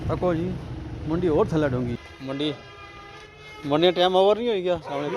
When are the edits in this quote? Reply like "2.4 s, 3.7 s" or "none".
2.0 s